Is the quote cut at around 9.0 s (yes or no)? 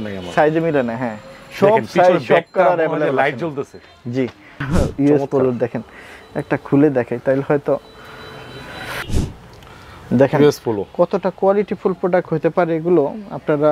yes